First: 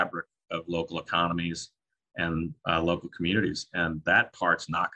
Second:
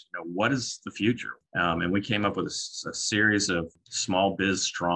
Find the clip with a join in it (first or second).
second